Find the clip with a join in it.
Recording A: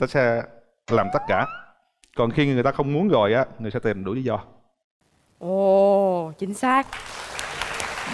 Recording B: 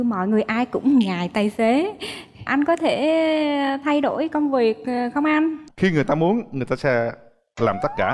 B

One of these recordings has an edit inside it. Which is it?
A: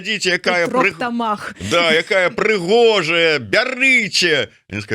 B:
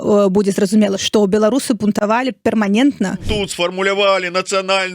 B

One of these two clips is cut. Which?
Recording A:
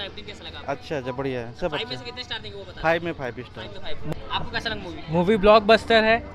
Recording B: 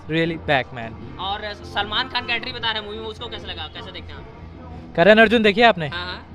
A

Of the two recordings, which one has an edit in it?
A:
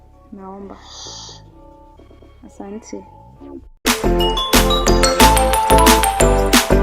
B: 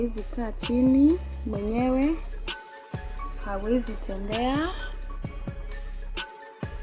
A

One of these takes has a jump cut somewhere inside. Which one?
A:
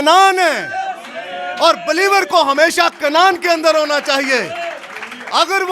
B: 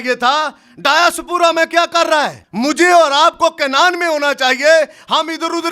B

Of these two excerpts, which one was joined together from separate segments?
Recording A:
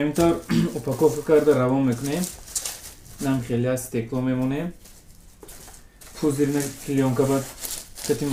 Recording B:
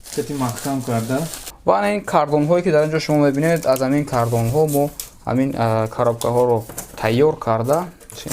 B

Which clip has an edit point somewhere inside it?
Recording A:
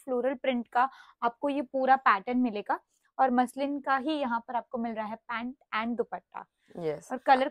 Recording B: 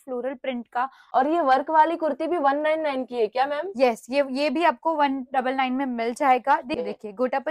B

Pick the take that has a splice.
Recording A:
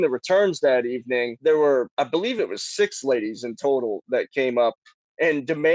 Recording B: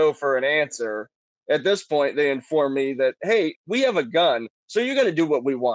A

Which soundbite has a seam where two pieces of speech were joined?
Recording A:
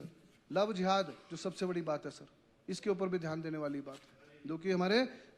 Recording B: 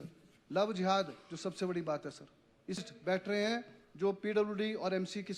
B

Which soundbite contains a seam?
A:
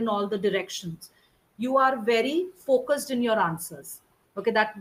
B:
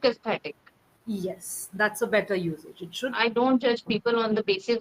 B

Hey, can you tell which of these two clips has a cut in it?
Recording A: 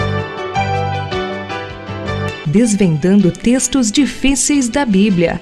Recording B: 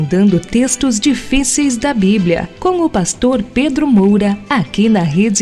B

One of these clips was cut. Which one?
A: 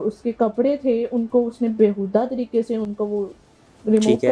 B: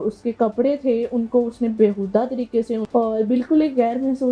B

